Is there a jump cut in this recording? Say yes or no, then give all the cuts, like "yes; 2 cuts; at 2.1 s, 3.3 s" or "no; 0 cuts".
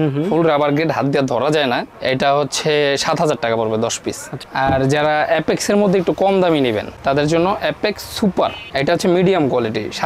no; 0 cuts